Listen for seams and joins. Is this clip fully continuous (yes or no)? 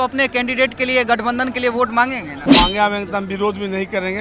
no